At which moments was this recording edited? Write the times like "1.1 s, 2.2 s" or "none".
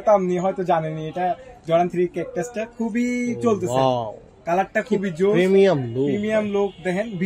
none

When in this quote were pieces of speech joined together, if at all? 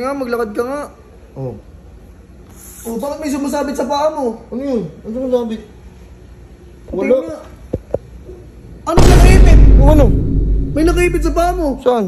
none

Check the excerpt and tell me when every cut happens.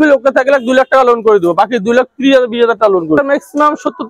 3.2 s

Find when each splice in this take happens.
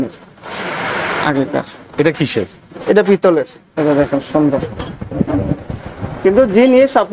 3.6 s

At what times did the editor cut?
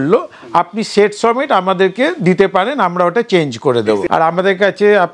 4.0 s

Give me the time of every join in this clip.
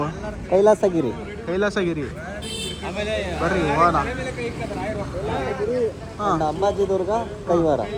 none

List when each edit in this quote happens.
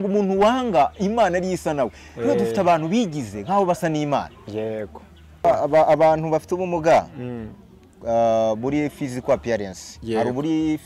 5.4 s

